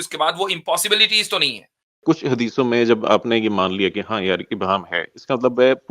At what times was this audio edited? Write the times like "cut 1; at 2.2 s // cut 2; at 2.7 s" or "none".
cut 1; at 2.0 s